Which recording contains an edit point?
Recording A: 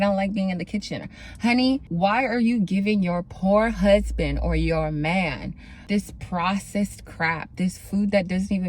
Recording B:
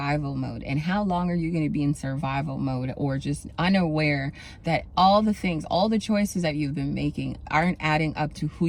A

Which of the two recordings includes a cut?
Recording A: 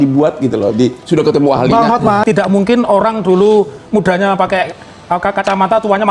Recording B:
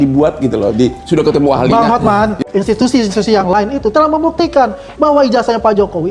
A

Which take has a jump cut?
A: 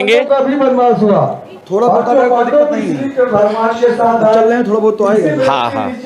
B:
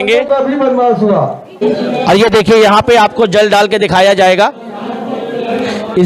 B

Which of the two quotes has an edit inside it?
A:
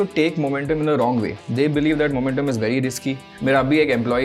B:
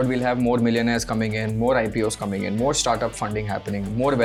A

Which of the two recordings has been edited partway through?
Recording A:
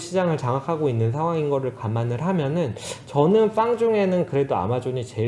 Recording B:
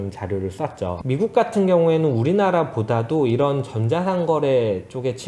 B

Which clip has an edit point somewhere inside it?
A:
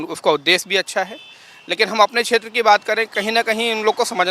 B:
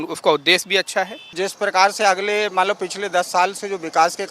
B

